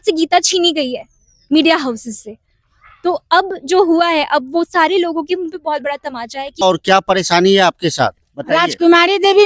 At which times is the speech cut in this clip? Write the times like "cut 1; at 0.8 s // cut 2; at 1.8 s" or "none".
cut 1; at 6.4 s